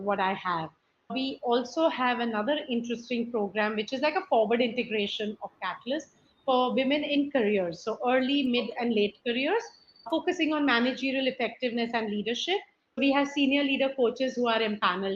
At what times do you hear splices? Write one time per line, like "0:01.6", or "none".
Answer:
0:01.0
0:10.1
0:13.0